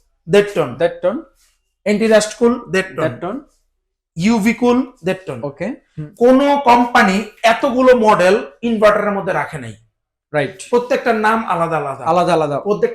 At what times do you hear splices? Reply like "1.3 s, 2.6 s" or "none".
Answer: none